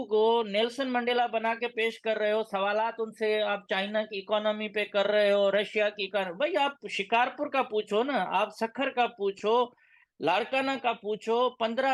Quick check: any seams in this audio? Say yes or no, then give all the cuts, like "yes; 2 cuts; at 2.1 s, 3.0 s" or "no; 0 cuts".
no; 0 cuts